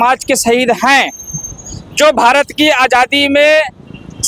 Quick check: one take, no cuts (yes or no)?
yes